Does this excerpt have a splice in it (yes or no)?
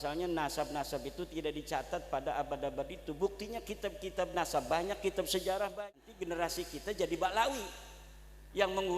yes